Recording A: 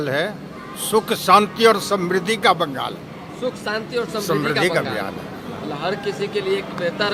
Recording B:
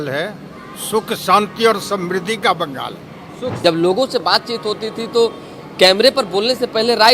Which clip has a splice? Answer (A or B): B